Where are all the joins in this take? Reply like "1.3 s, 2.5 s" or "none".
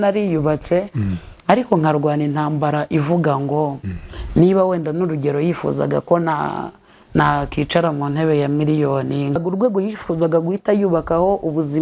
9.4 s